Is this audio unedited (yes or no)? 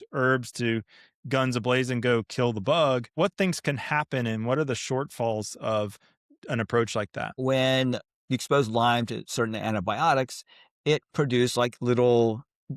no